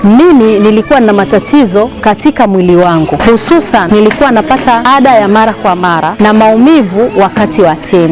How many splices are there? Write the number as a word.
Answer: three